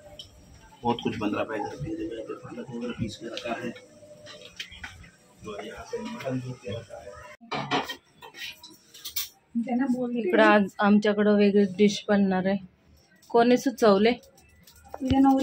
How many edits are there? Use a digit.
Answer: 1